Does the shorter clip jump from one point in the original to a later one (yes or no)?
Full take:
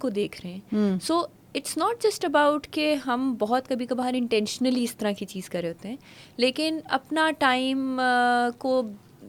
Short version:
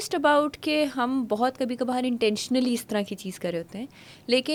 no